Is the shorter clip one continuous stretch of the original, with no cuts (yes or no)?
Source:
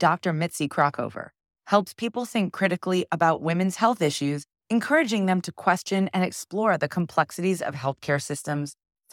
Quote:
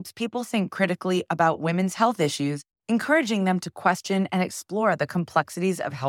yes